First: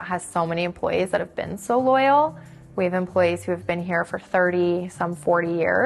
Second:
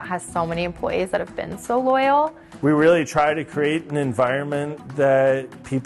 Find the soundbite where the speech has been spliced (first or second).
second